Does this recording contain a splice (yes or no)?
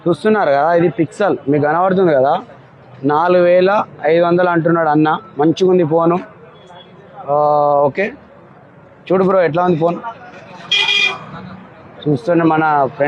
no